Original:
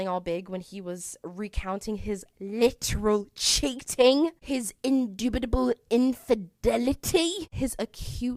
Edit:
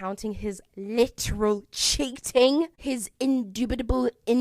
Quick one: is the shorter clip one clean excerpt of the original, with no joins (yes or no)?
yes